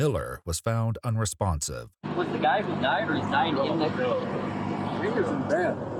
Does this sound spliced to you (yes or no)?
no